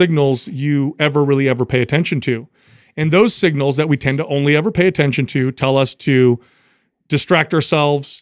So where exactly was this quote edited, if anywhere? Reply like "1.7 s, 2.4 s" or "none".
none